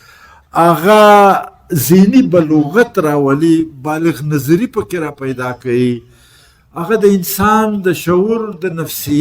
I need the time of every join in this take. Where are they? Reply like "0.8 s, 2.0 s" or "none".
none